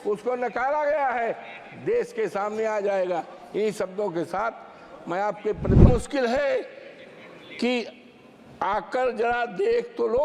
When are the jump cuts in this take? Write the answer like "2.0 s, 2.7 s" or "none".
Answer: 5.9 s